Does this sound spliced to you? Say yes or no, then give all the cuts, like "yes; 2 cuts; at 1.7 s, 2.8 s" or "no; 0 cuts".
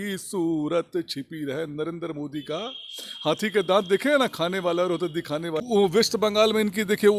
yes; 1 cut; at 5.6 s